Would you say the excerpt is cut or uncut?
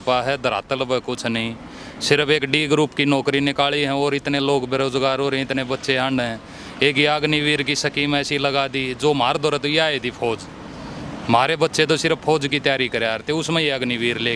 uncut